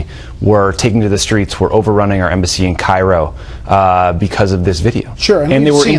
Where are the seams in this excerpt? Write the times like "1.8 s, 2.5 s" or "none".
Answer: none